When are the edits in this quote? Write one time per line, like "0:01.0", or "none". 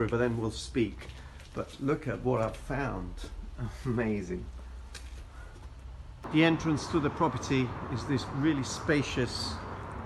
0:06.2